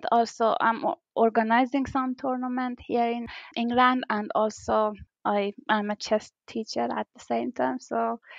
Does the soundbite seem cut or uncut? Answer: cut